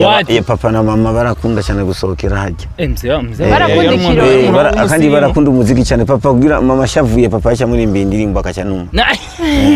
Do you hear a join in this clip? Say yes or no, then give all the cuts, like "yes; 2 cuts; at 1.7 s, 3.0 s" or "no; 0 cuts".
no; 0 cuts